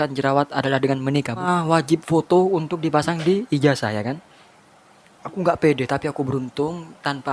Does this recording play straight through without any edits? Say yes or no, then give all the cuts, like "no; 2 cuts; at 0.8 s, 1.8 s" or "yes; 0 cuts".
no; 1 cut; at 1.4 s